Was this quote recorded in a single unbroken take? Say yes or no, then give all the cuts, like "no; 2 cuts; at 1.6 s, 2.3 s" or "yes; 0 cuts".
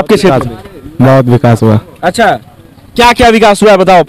yes; 0 cuts